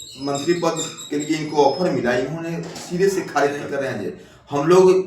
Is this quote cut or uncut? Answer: cut